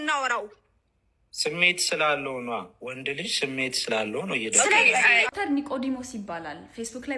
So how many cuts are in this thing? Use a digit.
1